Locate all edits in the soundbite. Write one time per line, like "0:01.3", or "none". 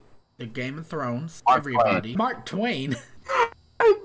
0:01.4
0:02.1
0:03.2